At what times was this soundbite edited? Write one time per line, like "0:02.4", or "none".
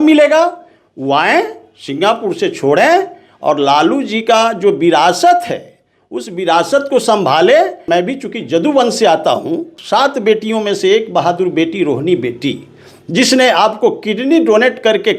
0:07.8
0:09.8